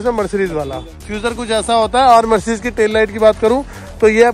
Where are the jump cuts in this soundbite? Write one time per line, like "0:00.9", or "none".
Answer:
0:01.1